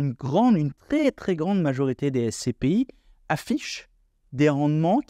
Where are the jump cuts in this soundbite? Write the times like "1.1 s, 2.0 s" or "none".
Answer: none

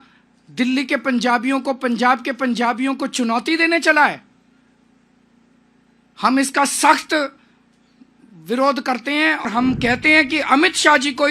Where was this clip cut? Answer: 9.4 s

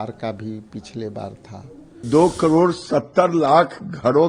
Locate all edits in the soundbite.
2.0 s

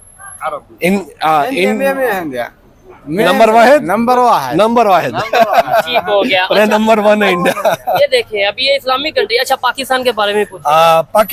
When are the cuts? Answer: none

